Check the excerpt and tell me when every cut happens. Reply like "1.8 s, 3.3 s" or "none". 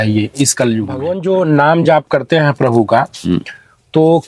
1.1 s